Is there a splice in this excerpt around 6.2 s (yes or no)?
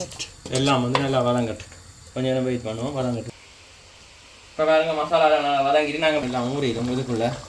yes